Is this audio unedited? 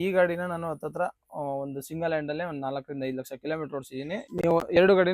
no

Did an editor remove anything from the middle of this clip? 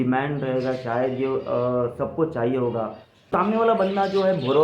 yes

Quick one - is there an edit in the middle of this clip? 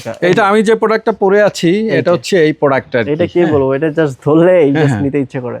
no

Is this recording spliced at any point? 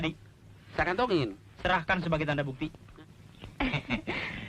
yes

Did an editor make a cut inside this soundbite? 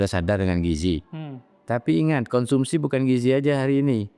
no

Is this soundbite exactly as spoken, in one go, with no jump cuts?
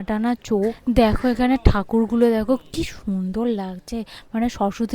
no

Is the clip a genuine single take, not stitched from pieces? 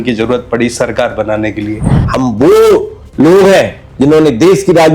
no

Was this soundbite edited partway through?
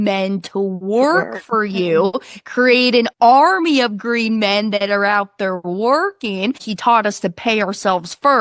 yes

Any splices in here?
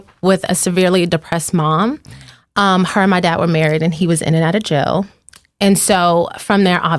no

